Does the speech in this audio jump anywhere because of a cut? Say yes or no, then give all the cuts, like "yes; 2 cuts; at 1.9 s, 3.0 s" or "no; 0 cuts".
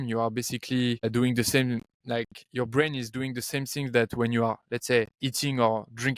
yes; 3 cuts; at 1.0 s, 1.9 s, 5.2 s